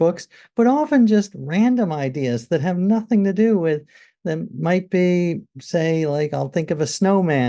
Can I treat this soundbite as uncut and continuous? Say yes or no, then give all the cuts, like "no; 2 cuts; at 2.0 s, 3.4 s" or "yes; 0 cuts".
yes; 0 cuts